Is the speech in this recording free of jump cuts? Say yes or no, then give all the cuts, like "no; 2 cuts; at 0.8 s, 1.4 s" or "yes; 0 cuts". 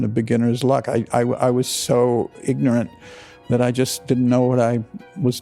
yes; 0 cuts